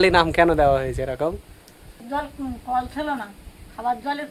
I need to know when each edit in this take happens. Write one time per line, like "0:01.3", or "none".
none